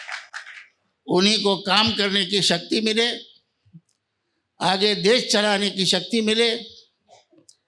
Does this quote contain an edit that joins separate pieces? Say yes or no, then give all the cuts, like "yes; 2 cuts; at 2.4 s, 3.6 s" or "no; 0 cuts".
no; 0 cuts